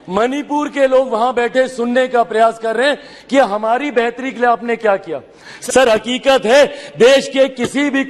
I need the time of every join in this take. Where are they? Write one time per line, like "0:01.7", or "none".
0:05.4